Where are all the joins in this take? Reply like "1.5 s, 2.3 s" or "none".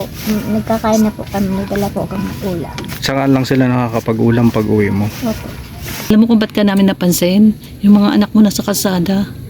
6.1 s